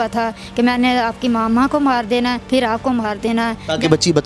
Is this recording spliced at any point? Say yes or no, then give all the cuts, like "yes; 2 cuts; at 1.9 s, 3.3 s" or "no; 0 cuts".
yes; 1 cut; at 2.4 s